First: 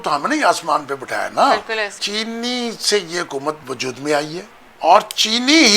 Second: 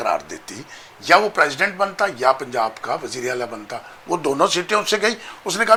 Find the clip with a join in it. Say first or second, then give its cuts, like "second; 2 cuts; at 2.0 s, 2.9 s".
first; 3 cuts; at 1.9 s, 3.6 s, 4.6 s